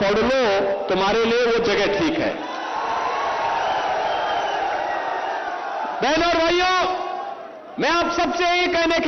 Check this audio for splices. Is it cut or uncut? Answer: uncut